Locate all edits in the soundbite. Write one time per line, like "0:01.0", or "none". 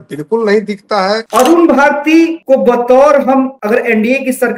0:01.2
0:02.4
0:03.6